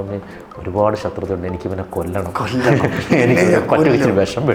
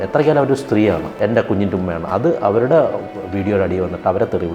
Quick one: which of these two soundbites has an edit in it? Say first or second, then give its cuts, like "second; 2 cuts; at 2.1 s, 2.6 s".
second; 1 cut; at 1.1 s